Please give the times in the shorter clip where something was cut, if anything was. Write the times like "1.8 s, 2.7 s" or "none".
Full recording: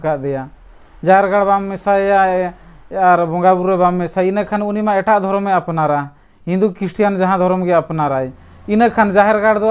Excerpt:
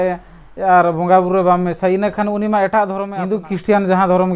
3.1 s

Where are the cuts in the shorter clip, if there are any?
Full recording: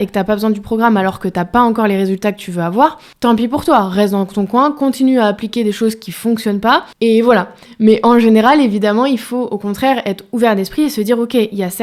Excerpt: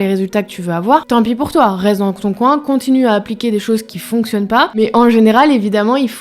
1.0 s, 4.8 s

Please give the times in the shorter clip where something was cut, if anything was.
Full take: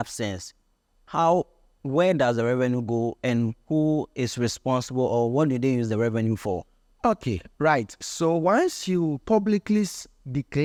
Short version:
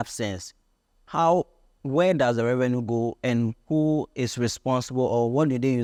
none

